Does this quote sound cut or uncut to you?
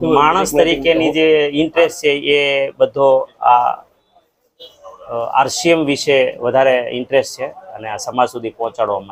uncut